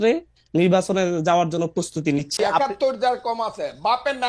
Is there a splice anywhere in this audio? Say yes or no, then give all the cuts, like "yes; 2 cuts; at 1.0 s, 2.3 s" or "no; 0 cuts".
yes; 1 cut; at 2.4 s